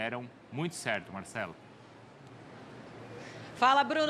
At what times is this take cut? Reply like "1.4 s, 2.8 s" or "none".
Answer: none